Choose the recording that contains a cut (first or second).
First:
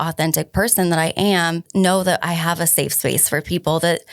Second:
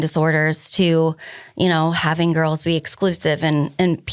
first